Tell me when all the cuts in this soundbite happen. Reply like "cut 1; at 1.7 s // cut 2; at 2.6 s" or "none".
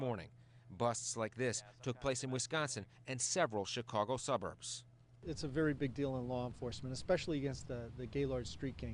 none